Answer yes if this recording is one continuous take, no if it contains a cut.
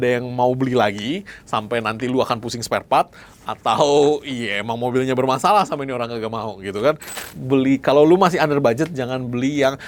no